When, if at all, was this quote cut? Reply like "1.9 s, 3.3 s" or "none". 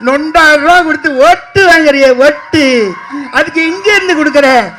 none